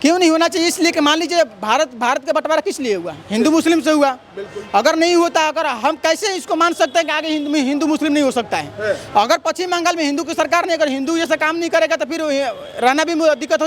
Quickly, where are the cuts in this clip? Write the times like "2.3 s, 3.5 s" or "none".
none